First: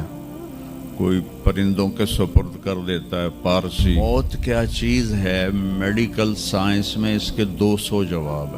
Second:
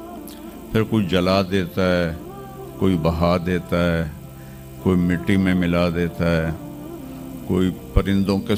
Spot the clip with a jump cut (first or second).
first